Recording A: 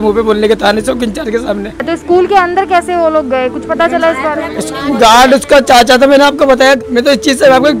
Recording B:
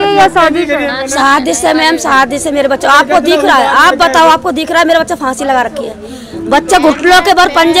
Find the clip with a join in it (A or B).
A